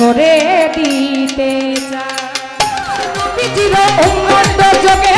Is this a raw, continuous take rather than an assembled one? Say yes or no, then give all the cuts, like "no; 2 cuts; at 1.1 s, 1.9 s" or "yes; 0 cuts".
no; 1 cut; at 3.3 s